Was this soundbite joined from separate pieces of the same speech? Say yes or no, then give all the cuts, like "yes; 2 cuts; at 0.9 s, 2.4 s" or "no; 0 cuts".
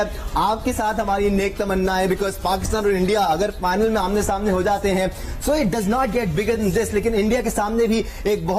no; 0 cuts